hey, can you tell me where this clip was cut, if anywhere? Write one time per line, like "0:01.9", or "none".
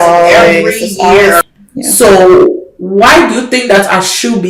0:01.4